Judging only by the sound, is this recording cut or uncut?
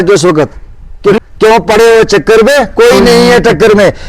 cut